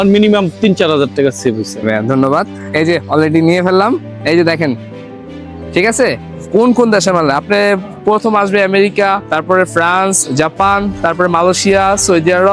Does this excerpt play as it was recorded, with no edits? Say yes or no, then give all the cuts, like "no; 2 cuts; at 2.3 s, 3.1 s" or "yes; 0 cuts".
no; 2 cuts; at 6.4 s, 9.2 s